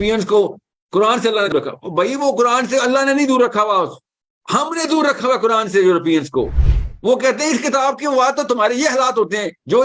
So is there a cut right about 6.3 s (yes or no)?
no